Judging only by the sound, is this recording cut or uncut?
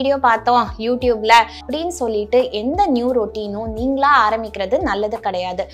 cut